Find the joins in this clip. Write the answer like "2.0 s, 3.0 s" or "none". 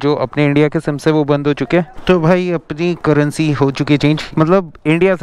1.9 s, 4.3 s